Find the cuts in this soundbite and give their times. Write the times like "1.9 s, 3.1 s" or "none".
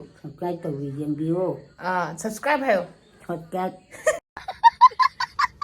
4.2 s